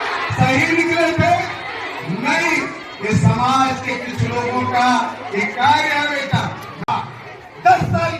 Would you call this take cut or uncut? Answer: cut